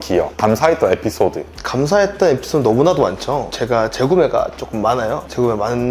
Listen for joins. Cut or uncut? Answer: uncut